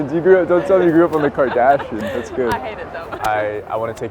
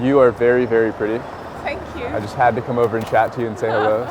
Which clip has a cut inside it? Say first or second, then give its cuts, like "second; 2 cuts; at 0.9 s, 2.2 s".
first; 1 cut; at 3.0 s